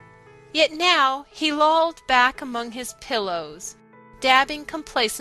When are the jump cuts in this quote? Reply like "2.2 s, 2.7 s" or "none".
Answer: none